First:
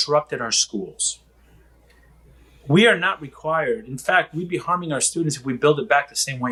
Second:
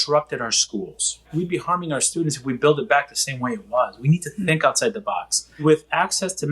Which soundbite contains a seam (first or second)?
second